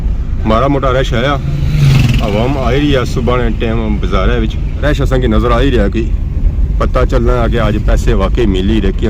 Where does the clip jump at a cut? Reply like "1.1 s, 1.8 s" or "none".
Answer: 4.8 s